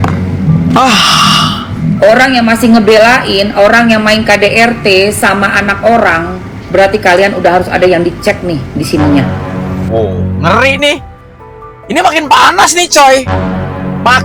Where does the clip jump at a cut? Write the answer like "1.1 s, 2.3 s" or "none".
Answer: none